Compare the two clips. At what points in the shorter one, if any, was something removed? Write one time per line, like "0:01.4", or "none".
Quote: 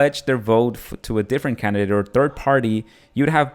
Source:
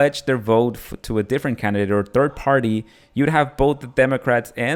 none